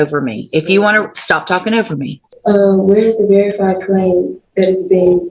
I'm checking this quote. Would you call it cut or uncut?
cut